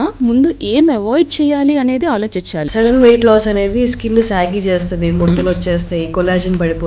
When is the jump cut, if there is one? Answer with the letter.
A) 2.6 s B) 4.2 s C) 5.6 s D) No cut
A